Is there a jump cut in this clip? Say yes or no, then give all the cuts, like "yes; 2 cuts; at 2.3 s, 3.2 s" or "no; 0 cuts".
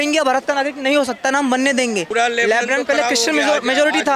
yes; 1 cut; at 2.1 s